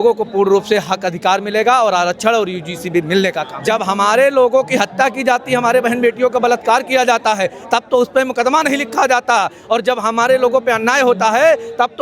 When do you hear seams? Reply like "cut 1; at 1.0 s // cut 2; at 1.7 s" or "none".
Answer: cut 1; at 3.5 s